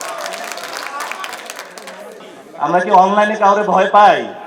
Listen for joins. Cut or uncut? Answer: uncut